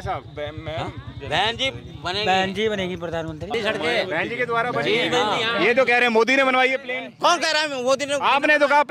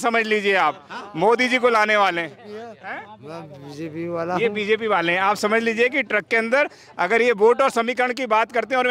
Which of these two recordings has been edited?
first; 1 cut; at 3.5 s

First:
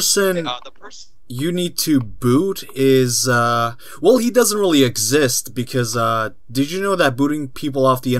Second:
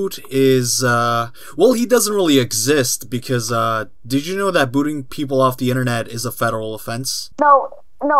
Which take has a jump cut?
second; 1 cut; at 7.2 s

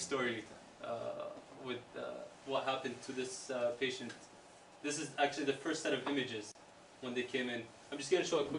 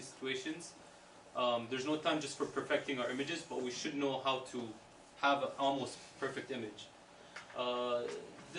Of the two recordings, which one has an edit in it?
first; 1 cut; at 6.2 s

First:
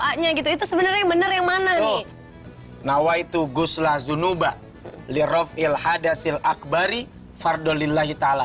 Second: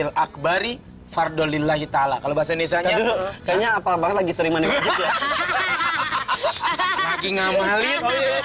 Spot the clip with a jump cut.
first; 1 cut; at 2.1 s

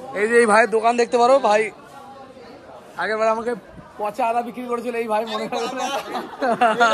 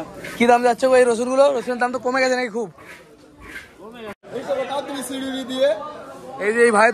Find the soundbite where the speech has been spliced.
second; 1 cut; at 4.2 s

